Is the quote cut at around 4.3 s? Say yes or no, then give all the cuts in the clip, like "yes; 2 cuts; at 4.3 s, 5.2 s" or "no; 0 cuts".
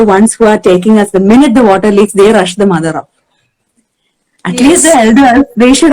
no; 0 cuts